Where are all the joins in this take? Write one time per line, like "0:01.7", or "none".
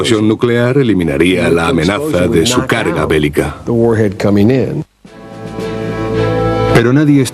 0:06.3